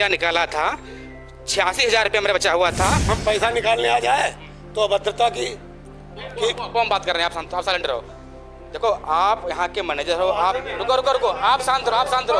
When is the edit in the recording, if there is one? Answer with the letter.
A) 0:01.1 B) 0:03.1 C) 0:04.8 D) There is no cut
B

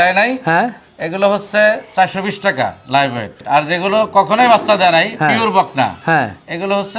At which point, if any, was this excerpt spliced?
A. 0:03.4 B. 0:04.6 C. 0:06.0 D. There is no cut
A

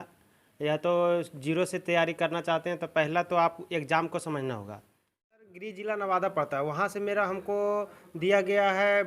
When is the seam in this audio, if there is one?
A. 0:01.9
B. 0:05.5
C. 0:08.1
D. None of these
B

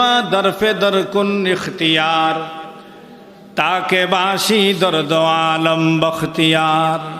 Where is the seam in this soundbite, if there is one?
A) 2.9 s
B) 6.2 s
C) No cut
C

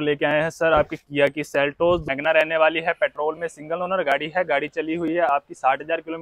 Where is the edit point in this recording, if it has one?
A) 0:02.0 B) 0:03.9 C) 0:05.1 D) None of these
A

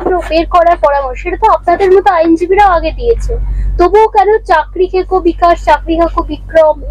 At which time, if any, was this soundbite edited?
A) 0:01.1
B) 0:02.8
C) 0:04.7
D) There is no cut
D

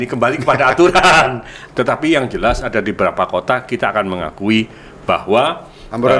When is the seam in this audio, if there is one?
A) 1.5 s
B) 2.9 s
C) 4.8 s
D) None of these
A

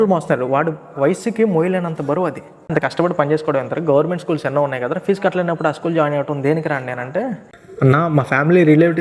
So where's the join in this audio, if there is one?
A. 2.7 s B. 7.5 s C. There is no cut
A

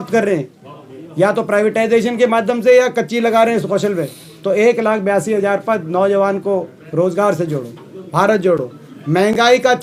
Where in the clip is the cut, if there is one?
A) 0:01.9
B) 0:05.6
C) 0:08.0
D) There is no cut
D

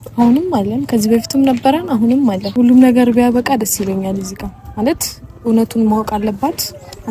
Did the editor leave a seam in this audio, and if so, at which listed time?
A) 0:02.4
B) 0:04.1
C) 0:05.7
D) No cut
A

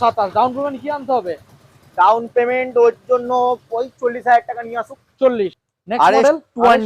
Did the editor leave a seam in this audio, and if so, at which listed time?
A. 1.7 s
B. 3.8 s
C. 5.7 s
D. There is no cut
C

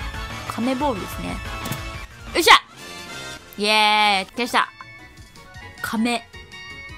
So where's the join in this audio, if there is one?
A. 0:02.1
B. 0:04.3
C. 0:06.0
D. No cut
B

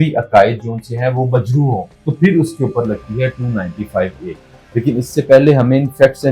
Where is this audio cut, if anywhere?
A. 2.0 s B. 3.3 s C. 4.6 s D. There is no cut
A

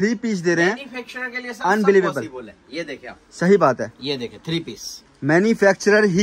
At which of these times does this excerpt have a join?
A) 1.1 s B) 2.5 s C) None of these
C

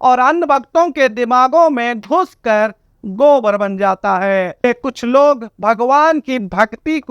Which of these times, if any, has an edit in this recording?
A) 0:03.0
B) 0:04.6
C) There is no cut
B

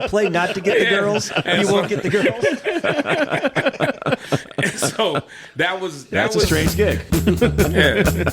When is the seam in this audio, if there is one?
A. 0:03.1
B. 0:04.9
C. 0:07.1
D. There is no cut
C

